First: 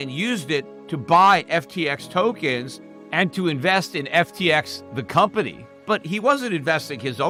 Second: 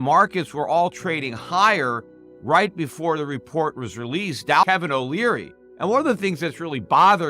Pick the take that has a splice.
second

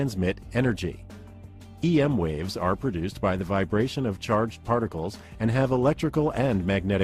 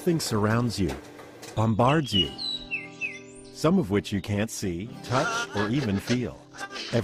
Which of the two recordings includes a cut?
first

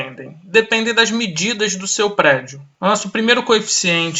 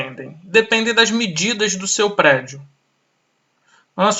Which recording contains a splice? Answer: first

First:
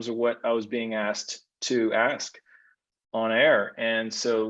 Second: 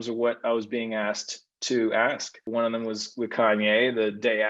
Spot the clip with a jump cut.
second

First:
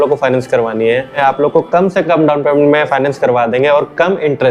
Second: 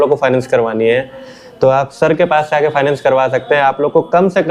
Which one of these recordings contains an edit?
first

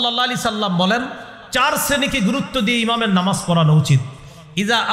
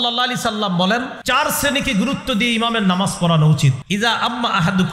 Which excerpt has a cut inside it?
second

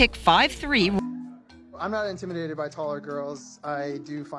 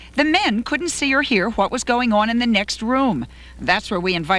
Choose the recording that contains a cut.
first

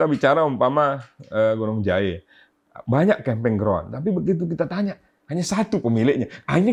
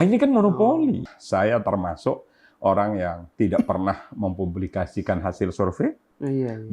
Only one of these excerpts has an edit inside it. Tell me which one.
second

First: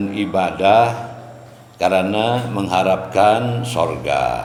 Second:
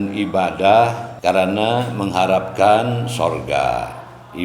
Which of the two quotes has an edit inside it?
second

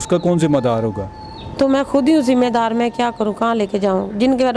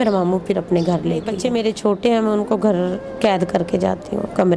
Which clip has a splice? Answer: second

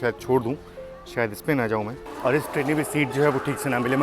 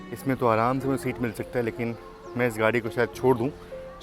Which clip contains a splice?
first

